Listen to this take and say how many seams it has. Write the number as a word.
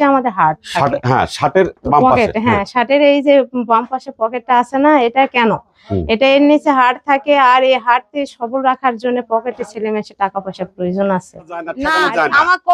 one